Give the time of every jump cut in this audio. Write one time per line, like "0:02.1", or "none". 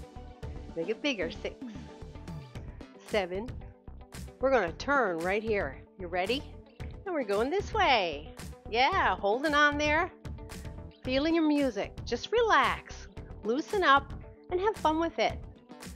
0:00.7
0:01.5
0:03.1